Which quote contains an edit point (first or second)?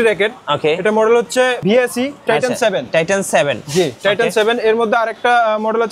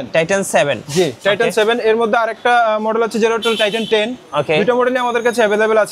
first